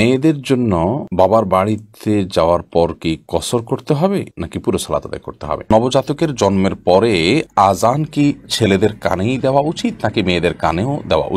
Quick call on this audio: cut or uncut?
cut